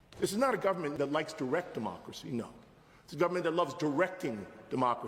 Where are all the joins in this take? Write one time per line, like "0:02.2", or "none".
0:00.9